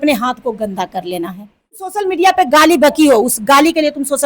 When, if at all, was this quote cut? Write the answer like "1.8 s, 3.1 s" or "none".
1.9 s